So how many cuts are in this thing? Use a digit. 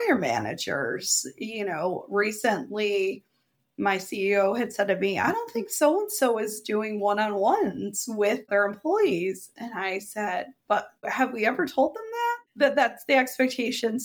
2